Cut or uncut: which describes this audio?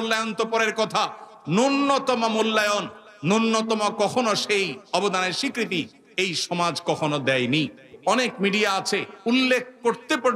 cut